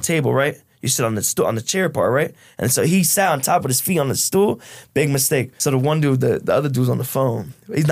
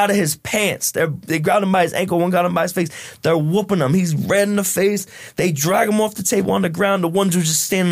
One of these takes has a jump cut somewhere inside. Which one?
first; 1 cut; at 5.5 s

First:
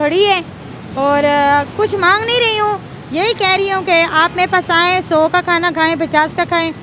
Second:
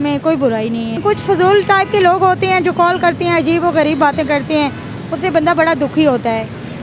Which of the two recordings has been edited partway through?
second; 1 cut; at 1.0 s

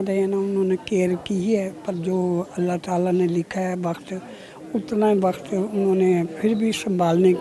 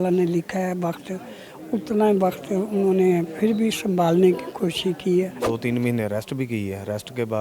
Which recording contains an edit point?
second; 1 cut; at 5.4 s

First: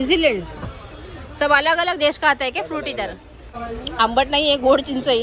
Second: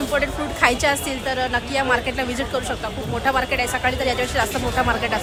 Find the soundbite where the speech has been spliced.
first; 1 cut; at 3.5 s

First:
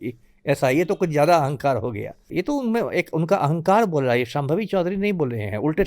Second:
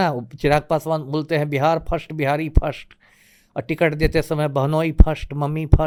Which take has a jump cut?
first; 1 cut; at 2.2 s

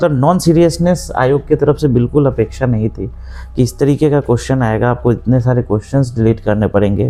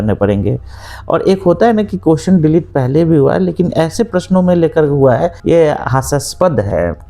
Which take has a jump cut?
second; 1 cut; at 5.4 s

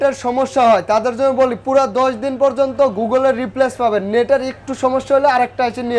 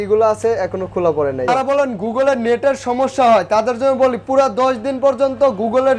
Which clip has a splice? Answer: second; 1 cut; at 1.5 s

